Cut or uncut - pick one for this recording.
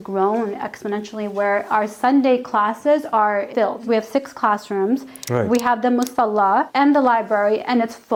uncut